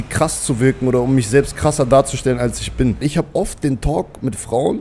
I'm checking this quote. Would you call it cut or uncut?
cut